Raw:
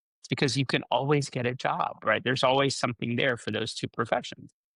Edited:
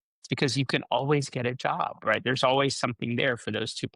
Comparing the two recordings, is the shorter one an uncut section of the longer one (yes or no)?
yes